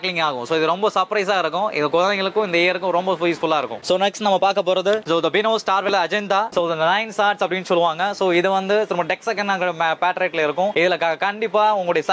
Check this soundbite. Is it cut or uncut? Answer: uncut